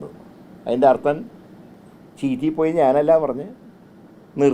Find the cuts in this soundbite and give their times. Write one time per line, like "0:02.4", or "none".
none

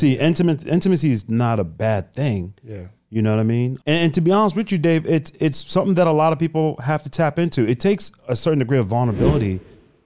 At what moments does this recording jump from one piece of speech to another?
0:03.8

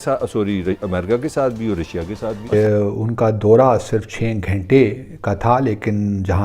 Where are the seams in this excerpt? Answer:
0:02.5

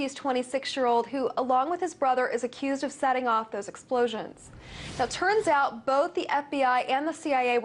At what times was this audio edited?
none

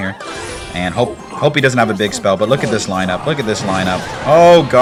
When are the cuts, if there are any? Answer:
none

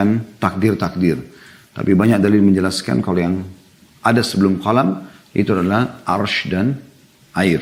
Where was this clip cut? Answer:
none

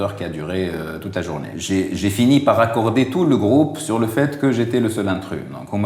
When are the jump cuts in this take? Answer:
0:01.5

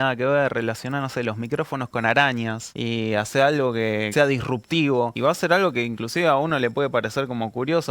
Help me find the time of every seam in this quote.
0:02.7
0:04.1
0:05.1

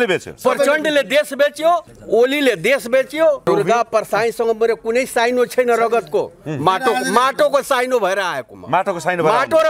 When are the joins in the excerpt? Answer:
0:01.9
0:03.4

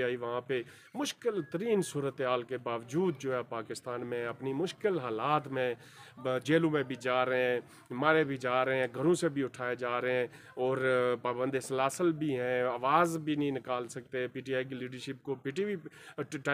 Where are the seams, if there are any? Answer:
none

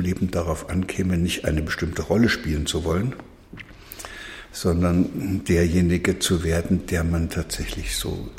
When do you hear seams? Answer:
none

